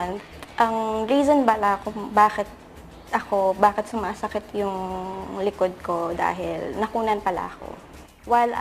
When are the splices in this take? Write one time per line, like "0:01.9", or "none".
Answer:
0:02.3

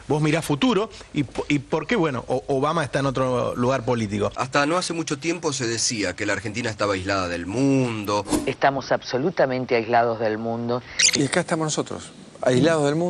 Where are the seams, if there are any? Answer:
0:04.4

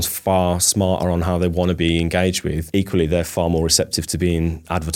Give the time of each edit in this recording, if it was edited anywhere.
0:02.6
0:04.0

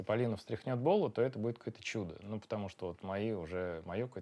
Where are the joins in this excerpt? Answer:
none

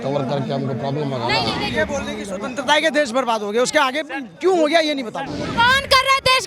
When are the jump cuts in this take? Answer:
0:01.6
0:05.5

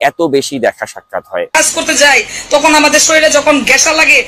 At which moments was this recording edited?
0:01.5

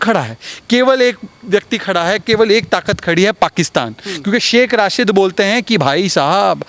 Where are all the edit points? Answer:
none

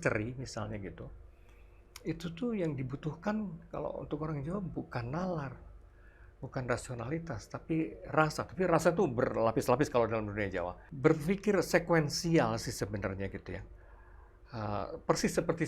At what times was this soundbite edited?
0:10.8

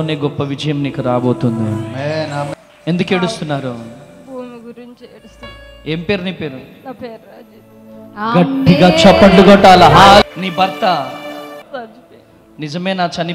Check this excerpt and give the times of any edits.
0:02.5
0:10.2
0:11.6

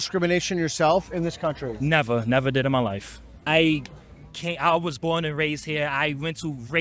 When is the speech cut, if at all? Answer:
0:03.4

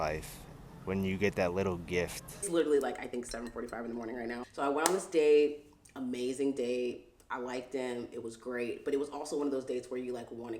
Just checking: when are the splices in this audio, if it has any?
0:02.4
0:04.5

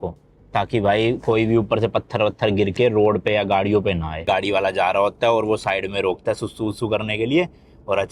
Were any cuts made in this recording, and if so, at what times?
0:04.2

